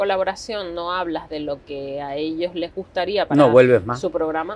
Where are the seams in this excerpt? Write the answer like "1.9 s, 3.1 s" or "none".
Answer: none